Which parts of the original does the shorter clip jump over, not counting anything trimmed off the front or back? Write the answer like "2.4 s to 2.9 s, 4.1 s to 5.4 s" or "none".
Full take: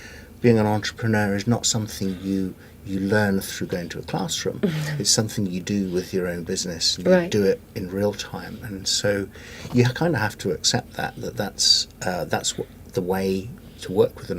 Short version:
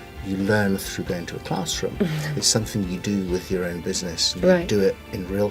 none